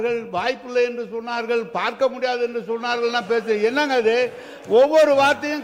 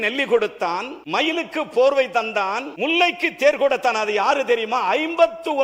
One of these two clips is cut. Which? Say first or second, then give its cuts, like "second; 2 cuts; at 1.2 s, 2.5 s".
second; 2 cuts; at 0.9 s, 2.7 s